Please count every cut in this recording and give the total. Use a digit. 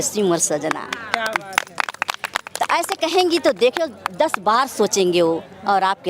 0